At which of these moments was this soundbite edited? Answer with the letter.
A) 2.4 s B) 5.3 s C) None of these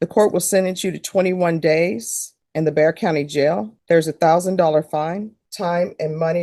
C